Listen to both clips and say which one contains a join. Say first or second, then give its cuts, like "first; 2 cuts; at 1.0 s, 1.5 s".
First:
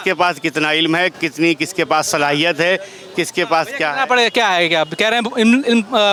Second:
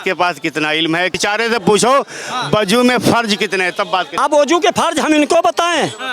second; 2 cuts; at 1.2 s, 4.1 s